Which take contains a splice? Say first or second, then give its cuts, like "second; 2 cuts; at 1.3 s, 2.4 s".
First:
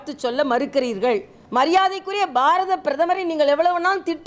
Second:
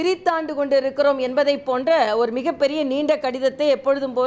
first; 1 cut; at 1.4 s